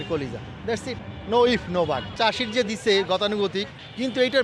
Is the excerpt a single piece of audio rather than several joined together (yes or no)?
no